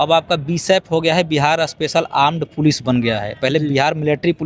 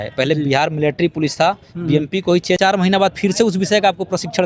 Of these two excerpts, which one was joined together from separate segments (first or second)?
second